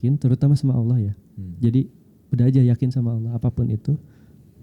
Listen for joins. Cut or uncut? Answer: uncut